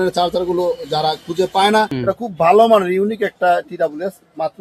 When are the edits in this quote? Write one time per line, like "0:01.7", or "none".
0:01.9